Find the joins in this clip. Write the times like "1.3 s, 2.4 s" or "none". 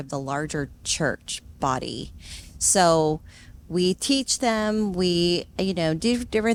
none